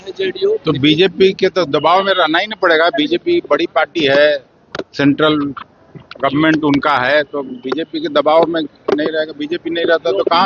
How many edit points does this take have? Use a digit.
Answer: 0